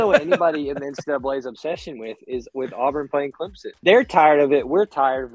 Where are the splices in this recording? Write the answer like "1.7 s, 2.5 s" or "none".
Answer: 3.6 s